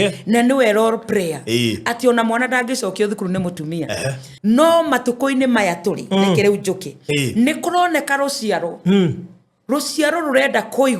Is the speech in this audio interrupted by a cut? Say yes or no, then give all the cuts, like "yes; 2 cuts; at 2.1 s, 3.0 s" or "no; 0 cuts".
yes; 1 cut; at 4.2 s